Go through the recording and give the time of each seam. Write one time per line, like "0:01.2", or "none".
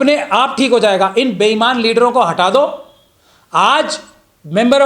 none